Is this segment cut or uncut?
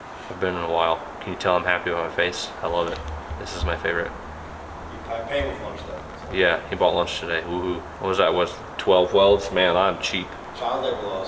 cut